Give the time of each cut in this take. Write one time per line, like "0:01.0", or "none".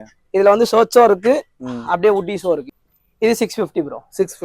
0:02.7

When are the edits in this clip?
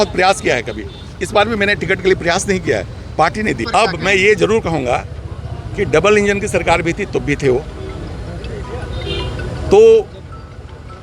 0:03.6

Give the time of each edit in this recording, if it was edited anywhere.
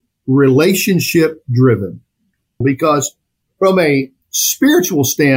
0:02.6

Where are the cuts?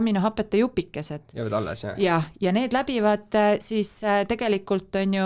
none

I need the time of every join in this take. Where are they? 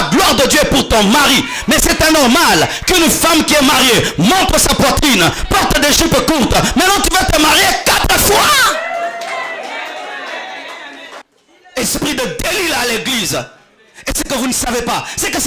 0:11.3

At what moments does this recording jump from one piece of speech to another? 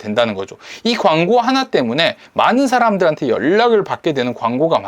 none

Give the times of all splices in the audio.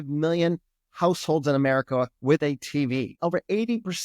0:03.1

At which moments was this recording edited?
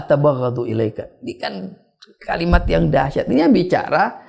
none

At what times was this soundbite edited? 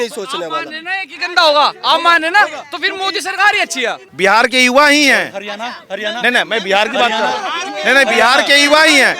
0:04.1

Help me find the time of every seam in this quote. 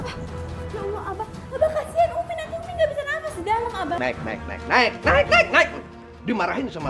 0:04.0

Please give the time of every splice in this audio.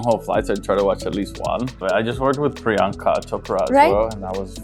0:01.7

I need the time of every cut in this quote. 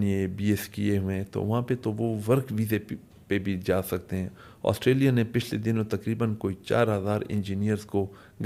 none

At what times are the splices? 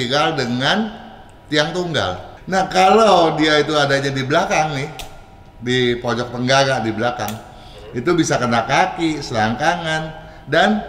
0:02.3

